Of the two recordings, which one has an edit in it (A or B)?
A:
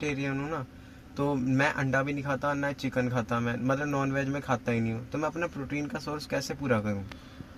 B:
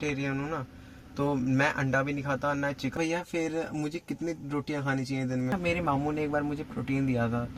B